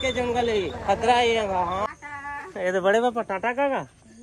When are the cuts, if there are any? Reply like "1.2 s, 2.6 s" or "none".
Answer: 1.9 s